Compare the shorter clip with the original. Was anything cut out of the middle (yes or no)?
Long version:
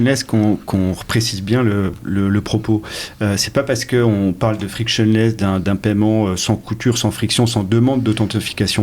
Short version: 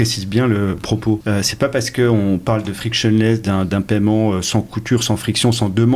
yes